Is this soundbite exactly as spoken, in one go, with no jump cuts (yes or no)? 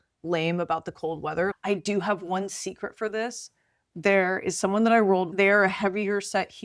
no